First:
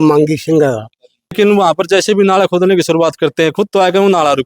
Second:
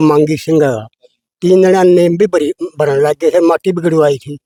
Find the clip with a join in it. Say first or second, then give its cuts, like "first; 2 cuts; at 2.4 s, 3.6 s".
first; 1 cut; at 1.3 s